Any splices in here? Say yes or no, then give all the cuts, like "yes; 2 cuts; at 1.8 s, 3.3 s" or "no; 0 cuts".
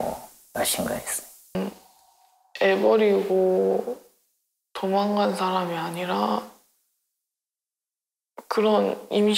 yes; 1 cut; at 1.6 s